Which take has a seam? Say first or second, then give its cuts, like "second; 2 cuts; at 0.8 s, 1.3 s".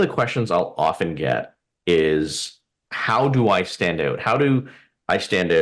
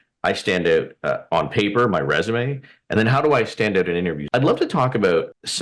second; 1 cut; at 4.2 s